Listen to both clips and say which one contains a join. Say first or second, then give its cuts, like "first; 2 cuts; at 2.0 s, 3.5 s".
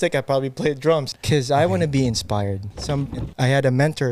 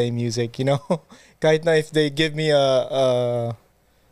first; 2 cuts; at 1.1 s, 2.8 s